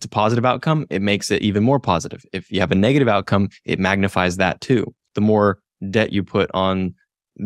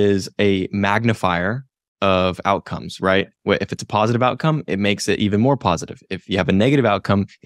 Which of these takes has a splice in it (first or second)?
first